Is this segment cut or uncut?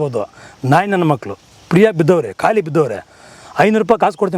uncut